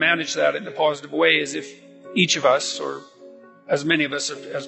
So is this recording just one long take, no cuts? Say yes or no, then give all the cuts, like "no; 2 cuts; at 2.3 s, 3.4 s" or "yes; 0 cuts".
yes; 0 cuts